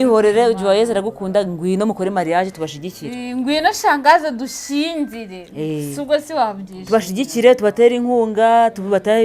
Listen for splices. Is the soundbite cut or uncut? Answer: uncut